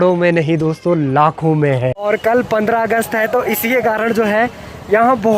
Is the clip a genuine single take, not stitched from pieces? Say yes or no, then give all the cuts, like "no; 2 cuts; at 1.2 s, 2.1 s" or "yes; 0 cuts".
no; 1 cut; at 2.1 s